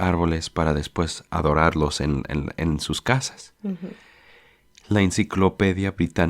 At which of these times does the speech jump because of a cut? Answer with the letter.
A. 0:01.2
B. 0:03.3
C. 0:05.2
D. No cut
A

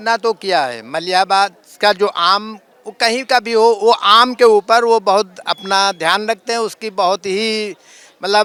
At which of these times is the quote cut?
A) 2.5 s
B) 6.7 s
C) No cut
C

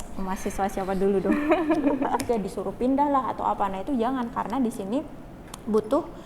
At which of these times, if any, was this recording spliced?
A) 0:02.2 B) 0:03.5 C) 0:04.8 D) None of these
A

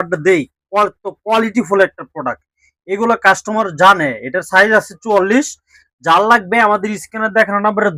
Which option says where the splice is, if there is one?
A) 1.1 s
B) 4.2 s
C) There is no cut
C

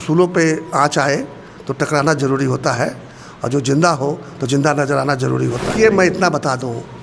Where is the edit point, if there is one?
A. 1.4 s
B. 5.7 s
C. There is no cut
B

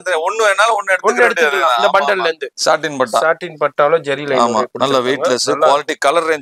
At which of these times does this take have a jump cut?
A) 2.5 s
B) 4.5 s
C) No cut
A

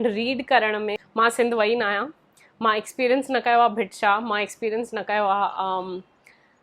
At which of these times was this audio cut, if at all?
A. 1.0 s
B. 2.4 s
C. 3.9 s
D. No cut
A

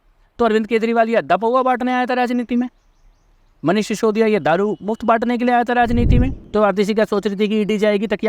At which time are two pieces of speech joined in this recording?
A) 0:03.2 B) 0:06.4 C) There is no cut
B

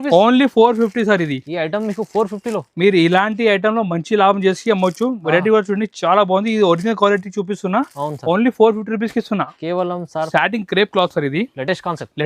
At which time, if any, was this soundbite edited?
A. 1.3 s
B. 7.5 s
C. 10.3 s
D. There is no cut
C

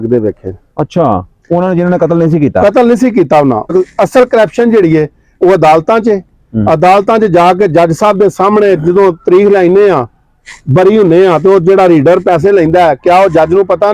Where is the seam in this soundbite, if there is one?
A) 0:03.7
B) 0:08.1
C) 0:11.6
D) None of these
A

